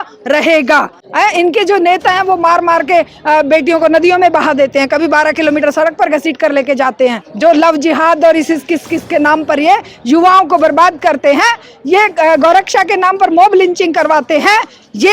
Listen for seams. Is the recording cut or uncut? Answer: cut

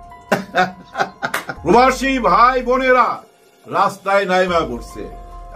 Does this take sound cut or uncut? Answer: cut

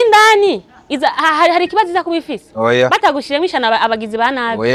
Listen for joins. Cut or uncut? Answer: uncut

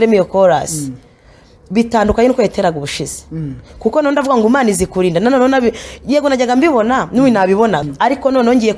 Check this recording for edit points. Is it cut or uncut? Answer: cut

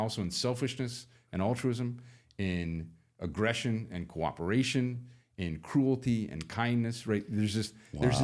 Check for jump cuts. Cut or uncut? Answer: uncut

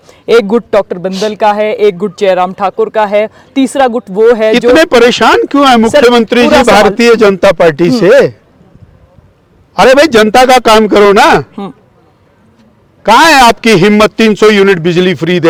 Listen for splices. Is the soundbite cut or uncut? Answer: uncut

